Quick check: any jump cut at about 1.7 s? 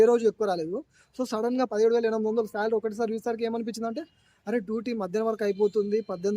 yes; 1 cut; at 1.7 s

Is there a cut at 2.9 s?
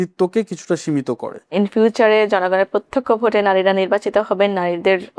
no; 1 cut; at 1.5 s

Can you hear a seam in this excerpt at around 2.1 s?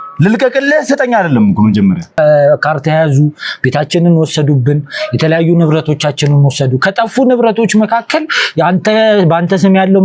yes; 1 cut; at 2.1 s

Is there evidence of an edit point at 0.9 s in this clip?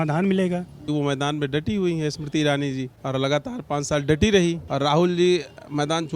yes; 3 cuts; at 0.9 s, 2.9 s, 4.6 s

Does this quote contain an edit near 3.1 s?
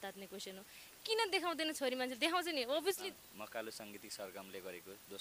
yes; 1 cut; at 3.1 s

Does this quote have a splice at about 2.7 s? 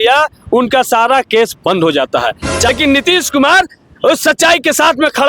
yes; 1 cut; at 2.7 s

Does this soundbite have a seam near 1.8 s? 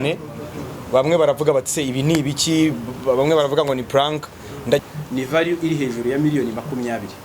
no; 1 cut; at 4.8 s

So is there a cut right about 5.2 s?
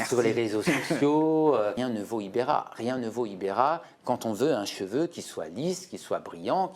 no; 1 cut; at 1.8 s

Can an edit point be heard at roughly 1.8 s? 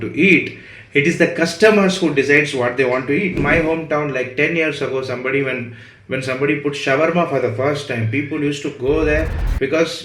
no; 1 cut; at 3.4 s

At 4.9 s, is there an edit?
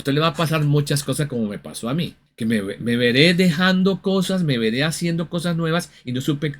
no; 1 cut; at 2.2 s

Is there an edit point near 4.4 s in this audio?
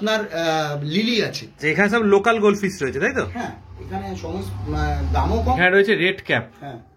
no; 2 cuts; at 1.4 s, 5.6 s

